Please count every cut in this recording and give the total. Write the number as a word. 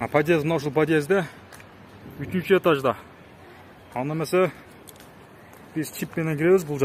zero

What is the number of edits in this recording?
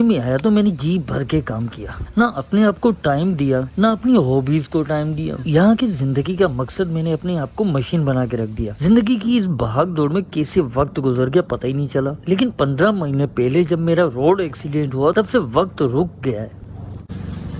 zero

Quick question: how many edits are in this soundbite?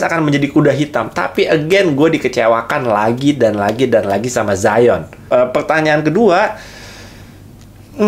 one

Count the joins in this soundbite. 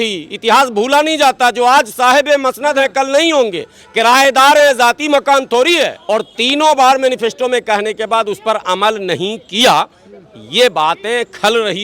one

